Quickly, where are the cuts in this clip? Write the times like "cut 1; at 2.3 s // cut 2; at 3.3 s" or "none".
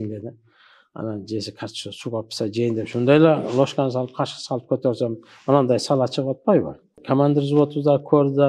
cut 1; at 6.9 s